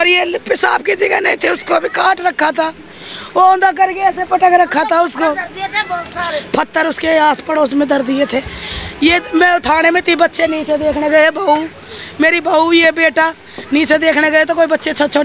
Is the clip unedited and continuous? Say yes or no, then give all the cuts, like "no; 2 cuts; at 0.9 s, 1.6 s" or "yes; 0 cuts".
yes; 0 cuts